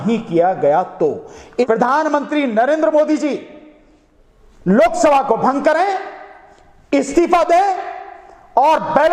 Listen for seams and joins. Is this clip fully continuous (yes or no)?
no